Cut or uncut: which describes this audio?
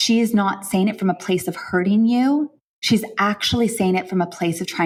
uncut